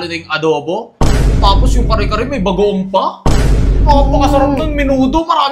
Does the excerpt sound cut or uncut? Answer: uncut